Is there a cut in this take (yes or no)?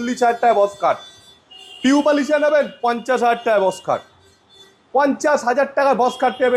no